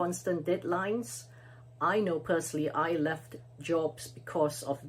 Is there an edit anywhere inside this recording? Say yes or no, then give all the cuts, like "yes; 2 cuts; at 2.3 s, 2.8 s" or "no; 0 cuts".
no; 0 cuts